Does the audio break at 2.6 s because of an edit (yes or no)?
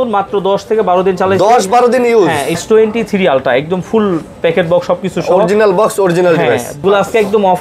yes